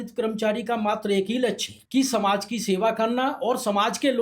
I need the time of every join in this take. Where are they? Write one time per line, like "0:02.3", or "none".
0:01.7